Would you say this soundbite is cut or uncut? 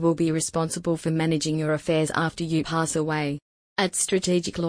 cut